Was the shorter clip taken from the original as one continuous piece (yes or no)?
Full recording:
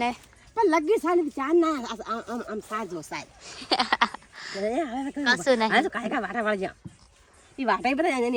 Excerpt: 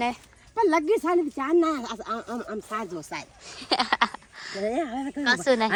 yes